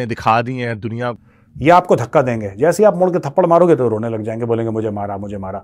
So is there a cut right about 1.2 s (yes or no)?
yes